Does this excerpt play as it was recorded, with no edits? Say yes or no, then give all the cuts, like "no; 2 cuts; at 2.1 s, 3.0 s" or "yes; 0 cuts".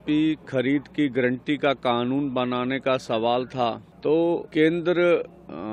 no; 2 cuts; at 3.9 s, 4.5 s